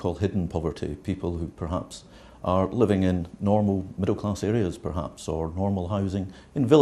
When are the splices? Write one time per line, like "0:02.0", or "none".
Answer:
0:02.0

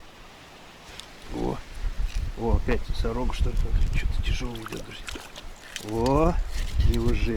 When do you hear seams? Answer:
none

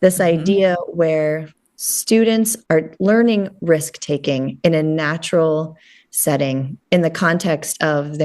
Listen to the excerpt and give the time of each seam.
0:02.6

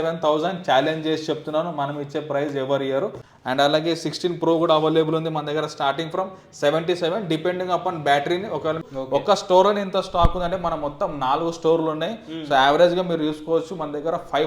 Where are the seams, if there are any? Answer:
0:03.3
0:08.9

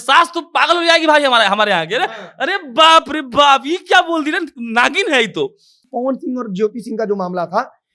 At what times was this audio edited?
0:05.8

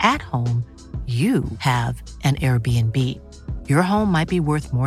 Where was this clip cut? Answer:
none

